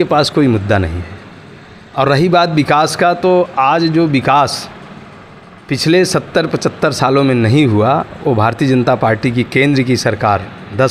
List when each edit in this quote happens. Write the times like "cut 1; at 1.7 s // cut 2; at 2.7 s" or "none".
none